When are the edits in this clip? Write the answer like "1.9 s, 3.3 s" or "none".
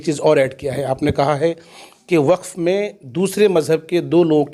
none